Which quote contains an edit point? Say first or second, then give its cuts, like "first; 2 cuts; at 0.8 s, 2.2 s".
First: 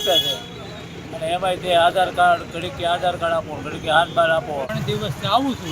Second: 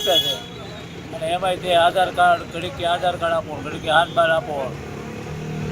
first; 1 cut; at 4.7 s